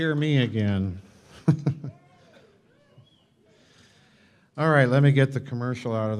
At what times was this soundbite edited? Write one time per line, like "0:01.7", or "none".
none